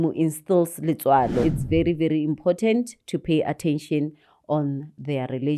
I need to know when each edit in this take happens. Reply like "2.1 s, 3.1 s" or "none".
1.4 s